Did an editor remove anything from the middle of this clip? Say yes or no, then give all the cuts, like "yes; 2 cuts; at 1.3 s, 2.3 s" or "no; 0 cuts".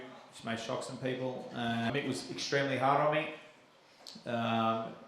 yes; 1 cut; at 1.9 s